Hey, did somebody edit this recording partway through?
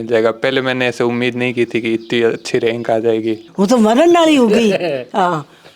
yes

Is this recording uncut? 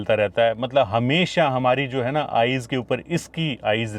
yes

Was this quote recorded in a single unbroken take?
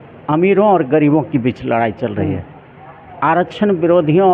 yes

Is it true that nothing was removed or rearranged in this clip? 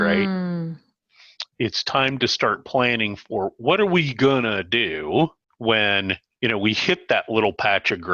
no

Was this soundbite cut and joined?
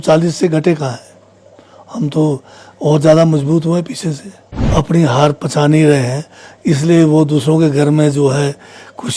yes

